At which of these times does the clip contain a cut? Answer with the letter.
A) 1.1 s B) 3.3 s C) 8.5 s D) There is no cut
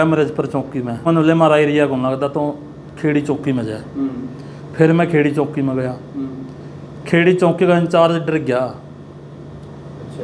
A